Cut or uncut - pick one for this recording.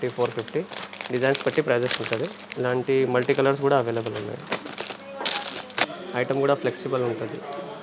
cut